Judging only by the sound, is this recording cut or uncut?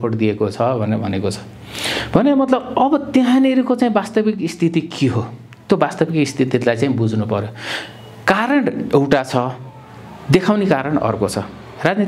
uncut